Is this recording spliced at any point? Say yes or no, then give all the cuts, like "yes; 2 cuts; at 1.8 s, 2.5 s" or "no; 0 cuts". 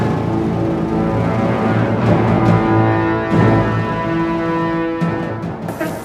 no; 0 cuts